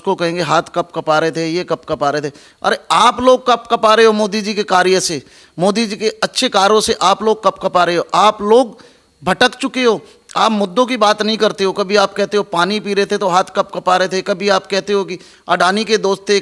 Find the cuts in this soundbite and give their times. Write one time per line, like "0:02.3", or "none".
none